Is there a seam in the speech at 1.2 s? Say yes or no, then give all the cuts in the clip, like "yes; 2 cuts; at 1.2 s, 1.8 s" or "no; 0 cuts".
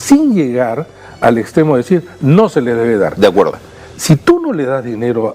no; 1 cut; at 3.5 s